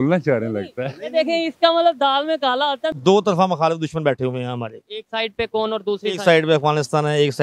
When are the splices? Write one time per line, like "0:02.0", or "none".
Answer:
0:03.0